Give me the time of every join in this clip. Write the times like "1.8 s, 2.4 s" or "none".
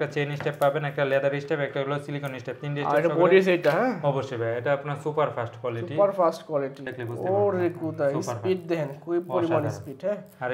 none